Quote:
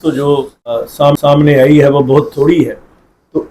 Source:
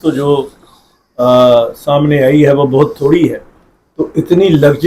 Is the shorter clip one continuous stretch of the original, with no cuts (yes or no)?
no